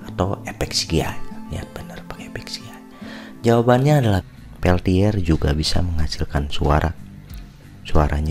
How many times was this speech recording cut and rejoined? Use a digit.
1